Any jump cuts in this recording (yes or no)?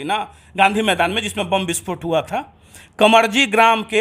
no